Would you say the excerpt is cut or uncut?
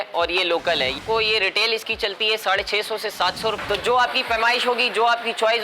cut